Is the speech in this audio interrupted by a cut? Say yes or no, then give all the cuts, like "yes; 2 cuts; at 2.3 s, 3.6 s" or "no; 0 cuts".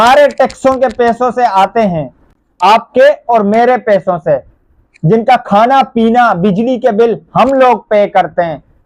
no; 0 cuts